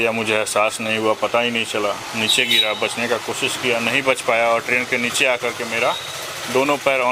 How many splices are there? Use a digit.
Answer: 0